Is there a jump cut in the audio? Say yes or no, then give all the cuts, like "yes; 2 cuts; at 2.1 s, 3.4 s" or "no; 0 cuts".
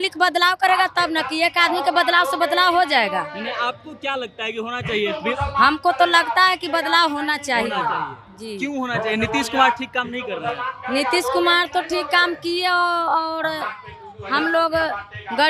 no; 0 cuts